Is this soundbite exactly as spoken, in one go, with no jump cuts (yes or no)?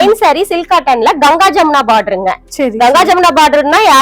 yes